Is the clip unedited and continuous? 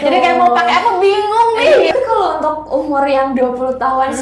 no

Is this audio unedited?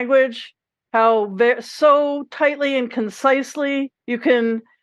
yes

